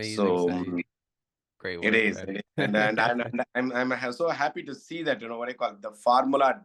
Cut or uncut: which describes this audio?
uncut